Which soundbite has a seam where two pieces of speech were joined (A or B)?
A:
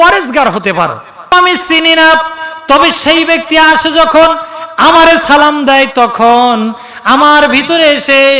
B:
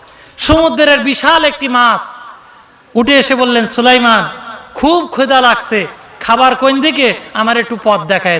A